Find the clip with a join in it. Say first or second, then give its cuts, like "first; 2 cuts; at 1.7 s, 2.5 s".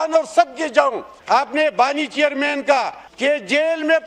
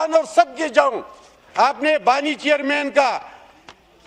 first; 2 cuts; at 1.1 s, 3.0 s